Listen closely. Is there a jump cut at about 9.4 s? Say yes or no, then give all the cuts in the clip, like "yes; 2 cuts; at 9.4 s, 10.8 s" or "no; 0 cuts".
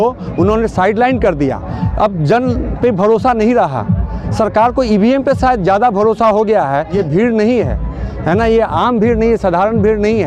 no; 2 cuts; at 1.8 s, 7.0 s